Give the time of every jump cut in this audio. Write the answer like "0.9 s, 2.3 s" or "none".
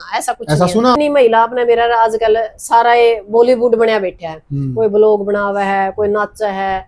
0.9 s

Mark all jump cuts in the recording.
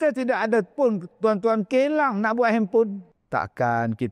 3.1 s

